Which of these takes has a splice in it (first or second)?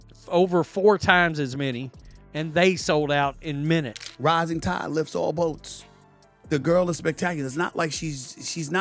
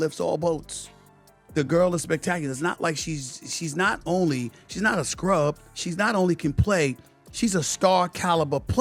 first